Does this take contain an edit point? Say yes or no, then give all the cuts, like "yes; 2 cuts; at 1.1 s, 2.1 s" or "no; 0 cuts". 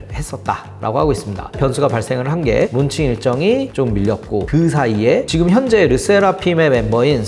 yes; 2 cuts; at 1.5 s, 2.7 s